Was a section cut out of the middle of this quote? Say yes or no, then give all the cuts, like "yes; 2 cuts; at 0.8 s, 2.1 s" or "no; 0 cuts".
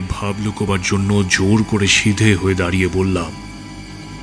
yes; 1 cut; at 3.3 s